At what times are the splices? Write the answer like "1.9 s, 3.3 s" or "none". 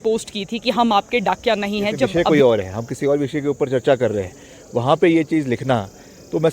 2.1 s